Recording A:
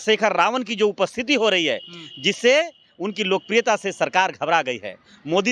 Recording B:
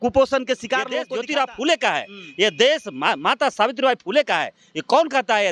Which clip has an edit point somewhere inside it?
B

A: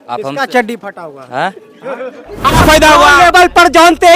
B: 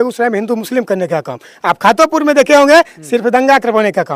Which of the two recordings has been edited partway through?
A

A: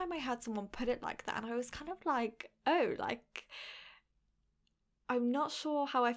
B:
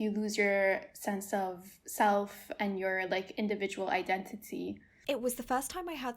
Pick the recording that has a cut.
B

